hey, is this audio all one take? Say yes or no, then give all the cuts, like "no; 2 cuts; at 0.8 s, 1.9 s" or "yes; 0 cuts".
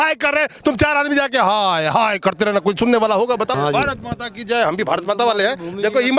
no; 1 cut; at 3.5 s